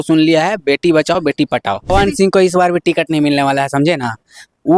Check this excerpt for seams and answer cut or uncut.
cut